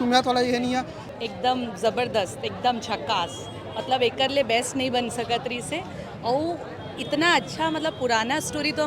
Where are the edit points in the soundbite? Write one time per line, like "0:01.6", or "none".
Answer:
0:01.0